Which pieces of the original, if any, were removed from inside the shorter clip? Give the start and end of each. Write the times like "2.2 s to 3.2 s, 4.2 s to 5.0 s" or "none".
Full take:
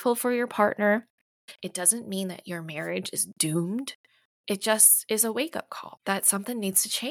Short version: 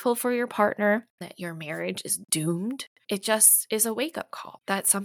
1.3 s to 2.4 s, 4.0 s to 4.3 s